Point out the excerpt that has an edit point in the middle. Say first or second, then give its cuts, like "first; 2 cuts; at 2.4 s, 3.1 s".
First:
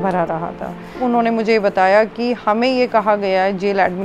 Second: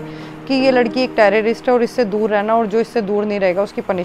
first; 1 cut; at 1.0 s